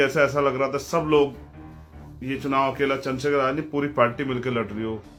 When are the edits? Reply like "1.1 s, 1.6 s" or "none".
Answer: none